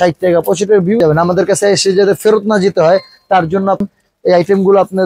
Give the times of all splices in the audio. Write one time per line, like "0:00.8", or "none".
0:01.0
0:03.9